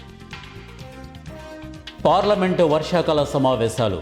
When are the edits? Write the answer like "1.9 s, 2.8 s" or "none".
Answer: 1.9 s

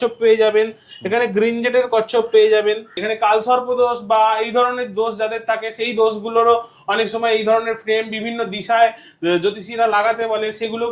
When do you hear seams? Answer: 3.0 s

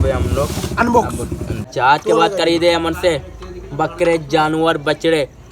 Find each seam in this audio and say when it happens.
1.6 s

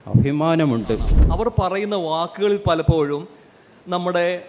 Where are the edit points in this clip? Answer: 1.2 s

